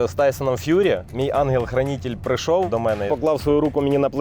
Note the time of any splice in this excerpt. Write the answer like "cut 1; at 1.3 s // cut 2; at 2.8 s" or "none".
cut 1; at 1.1 s // cut 2; at 3.0 s